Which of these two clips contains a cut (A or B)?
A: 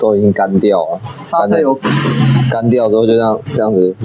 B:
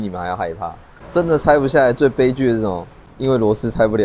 B